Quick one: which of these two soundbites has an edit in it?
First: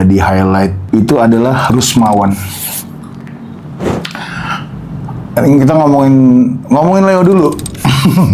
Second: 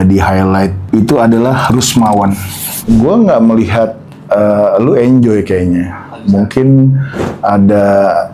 second; 1 cut; at 2.7 s

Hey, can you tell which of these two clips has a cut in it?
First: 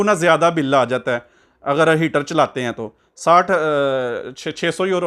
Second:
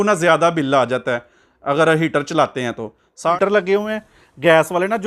second; 1 cut; at 3.2 s

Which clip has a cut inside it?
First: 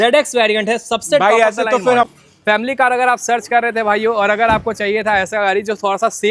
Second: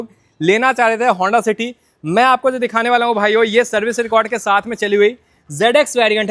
first; 1 cut; at 2.1 s

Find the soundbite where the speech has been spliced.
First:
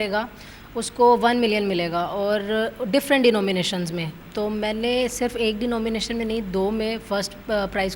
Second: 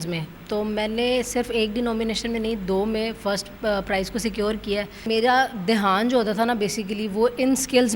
second; 1 cut; at 5.1 s

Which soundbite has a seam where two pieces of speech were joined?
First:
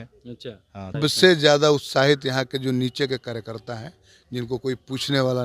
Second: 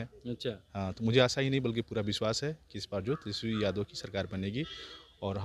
first; 1 cut; at 1.0 s

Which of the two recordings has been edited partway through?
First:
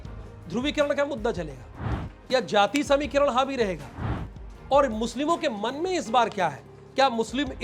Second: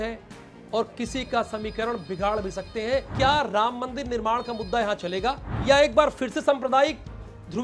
second; 2 cuts; at 3.1 s, 5.5 s

